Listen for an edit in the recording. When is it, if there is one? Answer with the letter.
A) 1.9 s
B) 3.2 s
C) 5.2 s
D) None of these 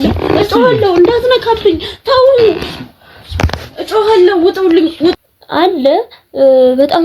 C